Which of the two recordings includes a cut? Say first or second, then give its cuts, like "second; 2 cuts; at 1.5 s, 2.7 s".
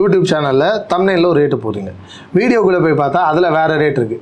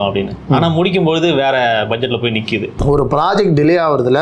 second; 1 cut; at 2.7 s